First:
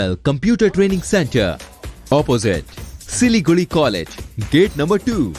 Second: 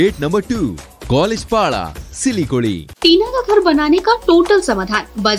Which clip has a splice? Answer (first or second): second